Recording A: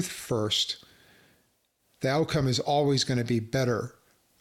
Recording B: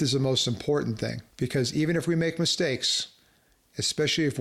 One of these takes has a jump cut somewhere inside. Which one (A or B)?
B